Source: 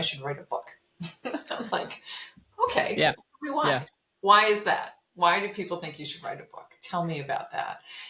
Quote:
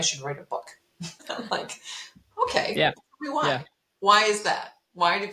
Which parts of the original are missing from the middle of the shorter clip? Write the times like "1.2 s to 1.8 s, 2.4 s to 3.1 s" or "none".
1.2 s to 1.4 s